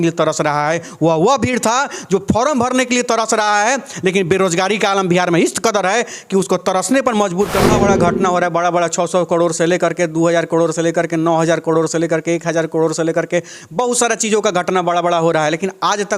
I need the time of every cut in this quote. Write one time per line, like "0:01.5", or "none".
0:07.7